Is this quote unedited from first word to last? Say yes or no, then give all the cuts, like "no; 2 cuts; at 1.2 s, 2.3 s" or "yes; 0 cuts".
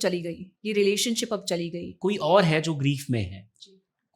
no; 1 cut; at 1.8 s